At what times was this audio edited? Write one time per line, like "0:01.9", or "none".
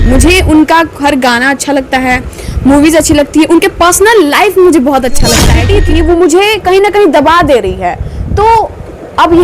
0:05.5